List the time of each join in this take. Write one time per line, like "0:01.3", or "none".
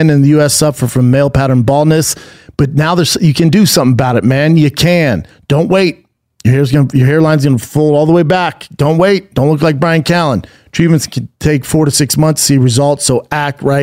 0:05.3